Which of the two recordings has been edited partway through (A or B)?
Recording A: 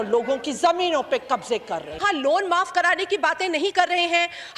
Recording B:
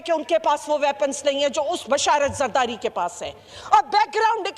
A